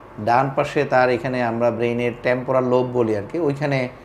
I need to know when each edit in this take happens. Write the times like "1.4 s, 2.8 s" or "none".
none